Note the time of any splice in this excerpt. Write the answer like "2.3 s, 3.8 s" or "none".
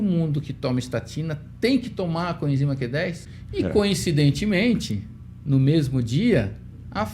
3.3 s